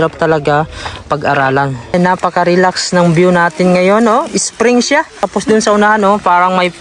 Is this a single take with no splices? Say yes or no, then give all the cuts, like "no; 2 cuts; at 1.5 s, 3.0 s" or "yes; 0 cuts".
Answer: no; 2 cuts; at 1.9 s, 5.2 s